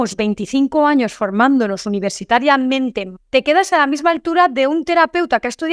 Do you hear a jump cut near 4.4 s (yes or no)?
no